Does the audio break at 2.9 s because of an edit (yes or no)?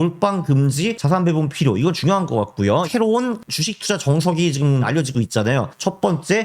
yes